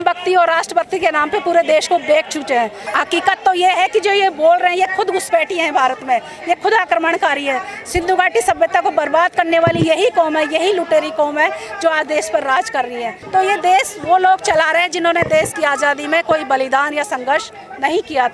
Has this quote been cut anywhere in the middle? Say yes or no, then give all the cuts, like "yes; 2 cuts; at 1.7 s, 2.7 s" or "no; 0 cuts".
yes; 2 cuts; at 2.8 s, 13.1 s